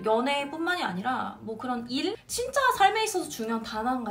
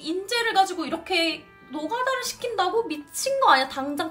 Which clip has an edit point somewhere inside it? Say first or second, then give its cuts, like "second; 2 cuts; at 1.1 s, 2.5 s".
first; 1 cut; at 2.2 s